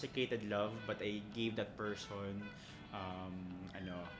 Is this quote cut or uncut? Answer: uncut